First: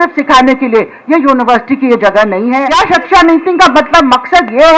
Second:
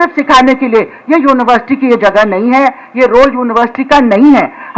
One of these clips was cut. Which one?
first; 1 cut; at 2.7 s

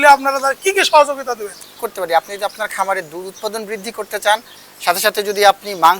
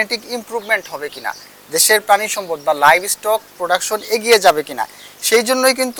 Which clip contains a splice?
first; 1 cut; at 1.7 s

